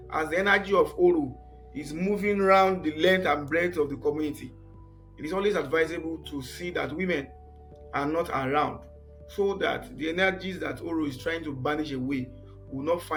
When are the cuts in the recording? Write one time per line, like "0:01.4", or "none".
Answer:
none